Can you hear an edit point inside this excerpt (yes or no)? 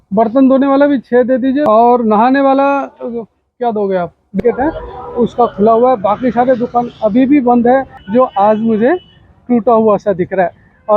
yes